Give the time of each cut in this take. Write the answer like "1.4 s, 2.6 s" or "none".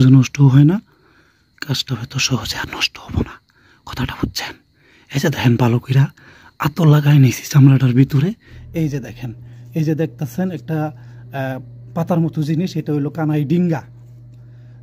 8.6 s